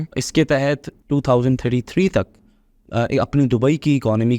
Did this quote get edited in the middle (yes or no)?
yes